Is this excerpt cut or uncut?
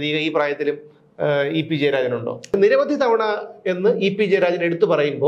cut